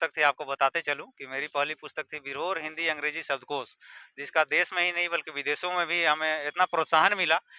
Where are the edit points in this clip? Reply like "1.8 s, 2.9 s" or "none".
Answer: none